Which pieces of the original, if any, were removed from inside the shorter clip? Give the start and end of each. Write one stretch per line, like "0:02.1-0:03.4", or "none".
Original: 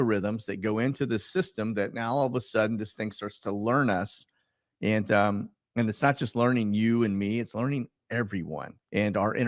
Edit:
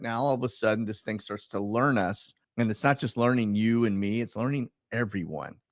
0:04.3-0:05.6

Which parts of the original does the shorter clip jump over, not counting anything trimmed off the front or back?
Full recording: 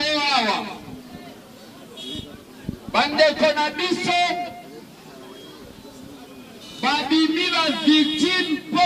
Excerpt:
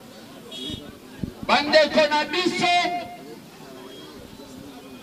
none

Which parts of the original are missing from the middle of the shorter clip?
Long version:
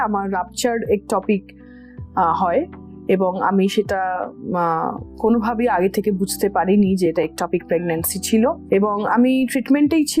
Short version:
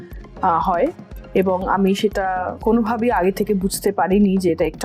0:04.3-0:05.1

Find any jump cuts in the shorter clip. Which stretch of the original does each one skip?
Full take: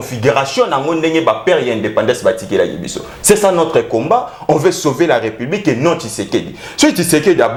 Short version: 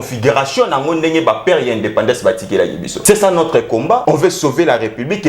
0:02.9-0:03.1
0:04.2-0:04.4

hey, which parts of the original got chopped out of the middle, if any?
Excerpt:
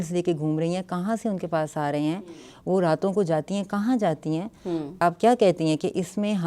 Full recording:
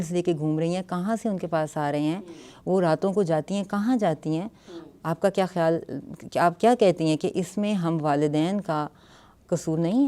0:05.0-0:06.4

